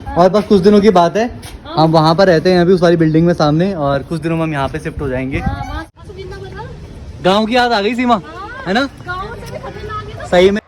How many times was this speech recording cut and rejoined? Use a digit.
1